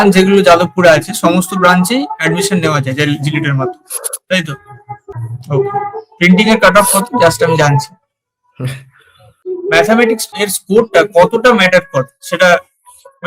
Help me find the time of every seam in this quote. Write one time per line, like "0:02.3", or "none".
0:05.2
0:09.4
0:10.4